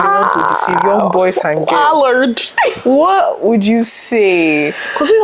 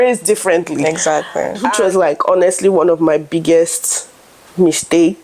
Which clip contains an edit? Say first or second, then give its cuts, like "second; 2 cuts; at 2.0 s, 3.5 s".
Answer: second; 1 cut; at 1.6 s